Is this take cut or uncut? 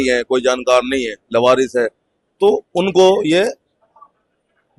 uncut